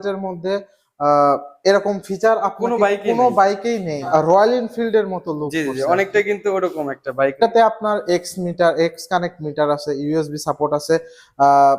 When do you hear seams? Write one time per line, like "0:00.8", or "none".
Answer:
0:04.1
0:07.4